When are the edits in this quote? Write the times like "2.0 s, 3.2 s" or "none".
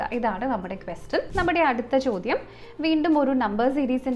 1.3 s